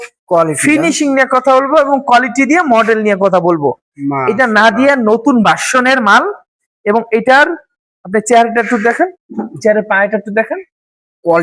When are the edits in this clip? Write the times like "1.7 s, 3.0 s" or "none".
none